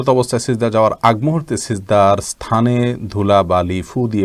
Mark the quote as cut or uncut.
uncut